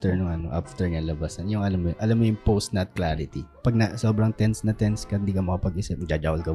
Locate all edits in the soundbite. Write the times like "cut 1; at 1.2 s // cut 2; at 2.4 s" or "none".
cut 1; at 3.6 s